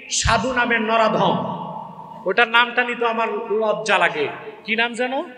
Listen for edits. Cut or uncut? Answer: uncut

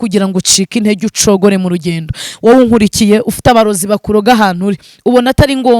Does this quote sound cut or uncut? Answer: cut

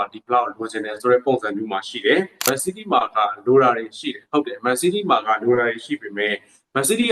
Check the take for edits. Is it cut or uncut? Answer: cut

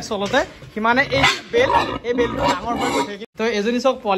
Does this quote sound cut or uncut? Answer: cut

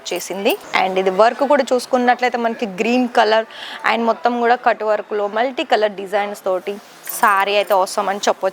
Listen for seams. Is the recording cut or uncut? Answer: uncut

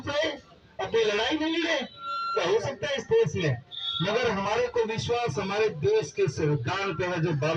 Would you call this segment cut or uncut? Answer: uncut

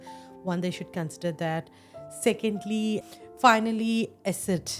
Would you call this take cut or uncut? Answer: cut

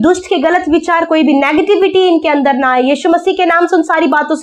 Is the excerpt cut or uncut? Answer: uncut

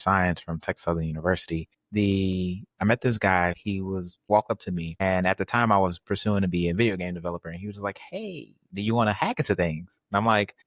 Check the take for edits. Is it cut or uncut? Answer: cut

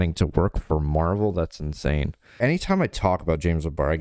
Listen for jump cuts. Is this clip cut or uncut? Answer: cut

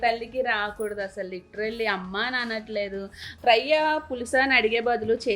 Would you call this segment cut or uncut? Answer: cut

